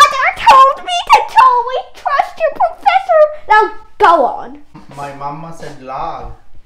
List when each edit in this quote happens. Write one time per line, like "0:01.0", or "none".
0:04.7